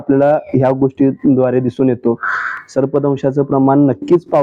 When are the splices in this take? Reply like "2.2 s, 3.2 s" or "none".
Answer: none